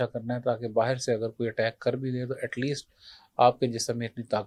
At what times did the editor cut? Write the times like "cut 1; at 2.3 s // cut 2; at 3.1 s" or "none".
none